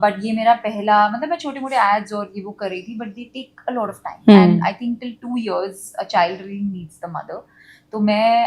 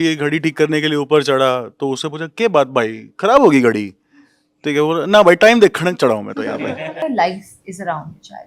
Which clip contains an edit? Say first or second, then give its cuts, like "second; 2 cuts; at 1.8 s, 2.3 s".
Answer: second; 1 cut; at 7.1 s